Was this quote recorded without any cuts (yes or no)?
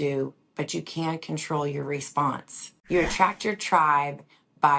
no